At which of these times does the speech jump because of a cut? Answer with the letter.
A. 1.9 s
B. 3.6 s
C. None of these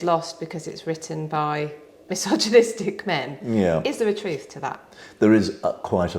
C